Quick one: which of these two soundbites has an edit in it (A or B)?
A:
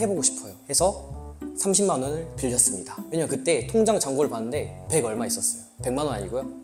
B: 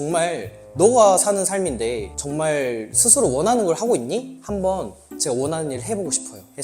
B